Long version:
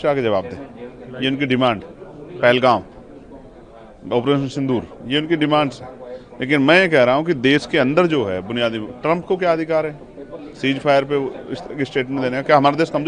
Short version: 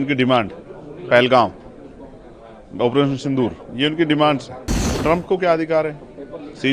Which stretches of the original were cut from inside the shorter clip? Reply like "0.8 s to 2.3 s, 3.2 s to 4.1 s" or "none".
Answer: 6.2 s to 8.9 s

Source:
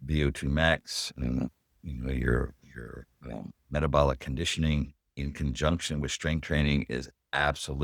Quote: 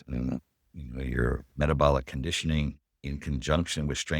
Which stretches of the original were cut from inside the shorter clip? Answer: 2.6 s to 3.6 s

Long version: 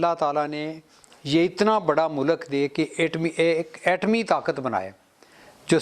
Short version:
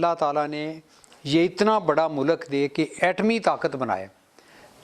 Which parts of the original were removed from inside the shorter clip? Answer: 2.9 s to 3.8 s

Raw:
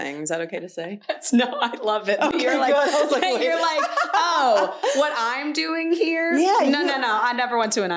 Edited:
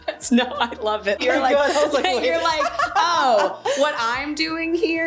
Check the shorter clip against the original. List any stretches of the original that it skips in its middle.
2.2 s to 2.4 s

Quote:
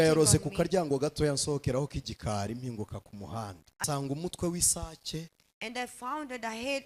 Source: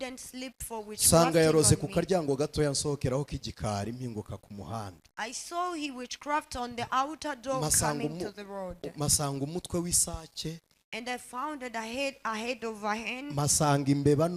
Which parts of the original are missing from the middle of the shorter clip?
5.2 s to 9.1 s

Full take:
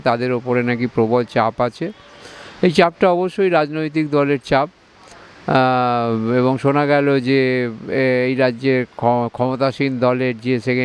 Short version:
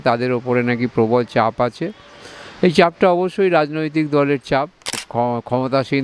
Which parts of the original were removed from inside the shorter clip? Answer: 5.0 s to 8.9 s

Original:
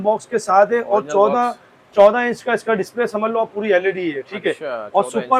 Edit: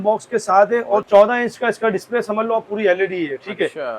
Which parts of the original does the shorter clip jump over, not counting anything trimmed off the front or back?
1.0 s to 1.9 s

